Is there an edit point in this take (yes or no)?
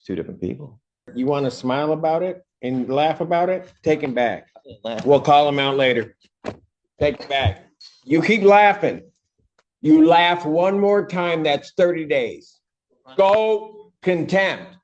yes